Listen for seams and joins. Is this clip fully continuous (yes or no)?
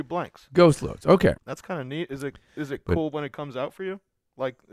no